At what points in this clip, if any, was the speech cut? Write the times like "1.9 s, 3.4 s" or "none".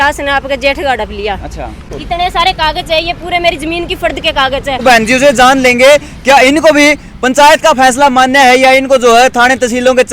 1.8 s, 4.8 s